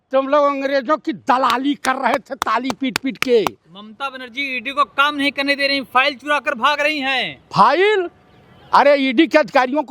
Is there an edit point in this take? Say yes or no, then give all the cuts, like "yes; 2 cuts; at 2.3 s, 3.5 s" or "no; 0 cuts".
no; 0 cuts